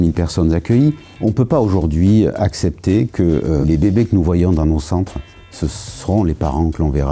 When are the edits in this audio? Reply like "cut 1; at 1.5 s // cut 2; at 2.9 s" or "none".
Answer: cut 1; at 1.1 s // cut 2; at 3.6 s